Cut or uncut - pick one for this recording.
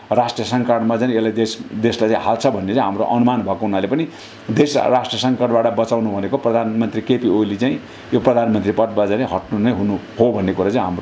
uncut